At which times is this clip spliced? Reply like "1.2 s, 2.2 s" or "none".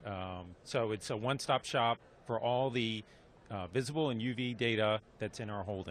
2.6 s